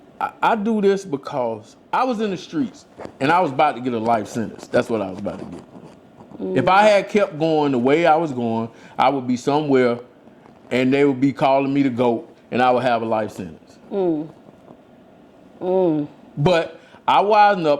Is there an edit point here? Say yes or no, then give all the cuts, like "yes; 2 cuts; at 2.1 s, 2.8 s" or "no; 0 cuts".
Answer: yes; 1 cut; at 1.7 s